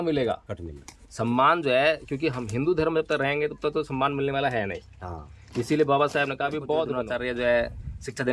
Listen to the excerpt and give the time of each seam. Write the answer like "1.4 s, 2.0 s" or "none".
7.0 s